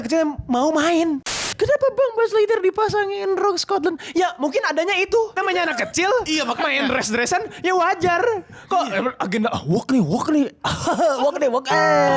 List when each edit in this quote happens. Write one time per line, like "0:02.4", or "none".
0:01.5
0:05.4